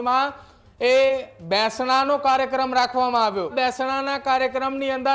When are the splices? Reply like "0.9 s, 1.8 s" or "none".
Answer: 3.5 s